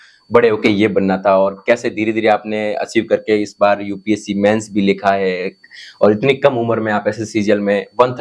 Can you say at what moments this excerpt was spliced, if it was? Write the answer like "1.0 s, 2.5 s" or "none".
none